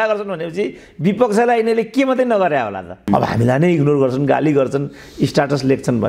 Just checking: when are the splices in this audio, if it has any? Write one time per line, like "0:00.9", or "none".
0:03.1